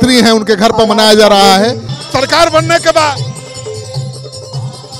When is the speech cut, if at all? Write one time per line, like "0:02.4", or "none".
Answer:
0:01.9

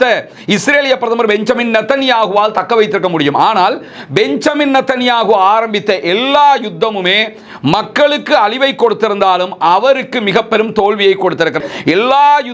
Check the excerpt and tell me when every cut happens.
0:11.6

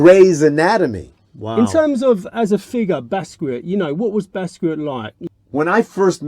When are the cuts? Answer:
0:01.5
0:05.1

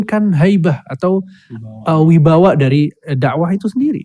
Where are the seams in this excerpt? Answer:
none

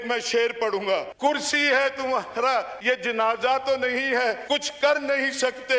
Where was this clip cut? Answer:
0:01.1
0:02.7
0:04.4

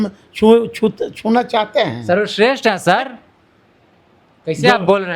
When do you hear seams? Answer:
none

